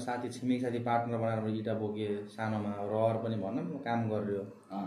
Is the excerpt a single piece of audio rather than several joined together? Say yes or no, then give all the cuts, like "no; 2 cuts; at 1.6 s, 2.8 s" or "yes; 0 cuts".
yes; 0 cuts